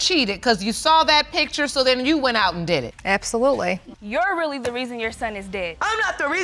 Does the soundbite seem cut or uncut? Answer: cut